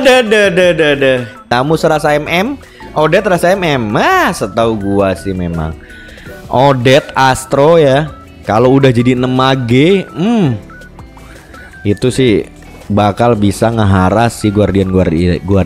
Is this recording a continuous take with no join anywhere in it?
no; 1 cut; at 1.4 s

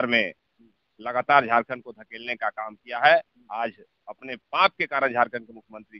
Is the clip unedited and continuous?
yes; 0 cuts

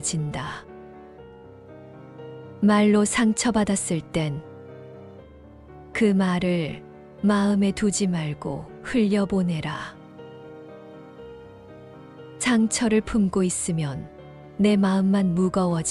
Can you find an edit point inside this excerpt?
no; 0 cuts

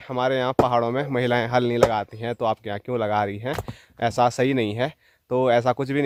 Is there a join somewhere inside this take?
no; 0 cuts

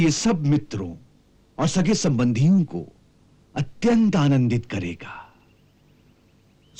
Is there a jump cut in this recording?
no; 0 cuts

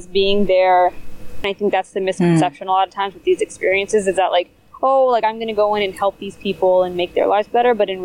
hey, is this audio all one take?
no; 1 cut; at 1.4 s

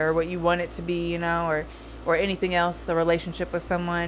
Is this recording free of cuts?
yes; 0 cuts

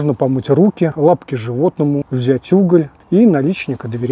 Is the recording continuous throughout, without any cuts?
no; 3 cuts; at 0.9 s, 2.1 s, 3.0 s

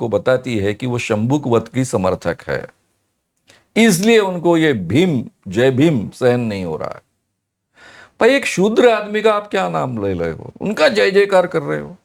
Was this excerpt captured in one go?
yes; 0 cuts

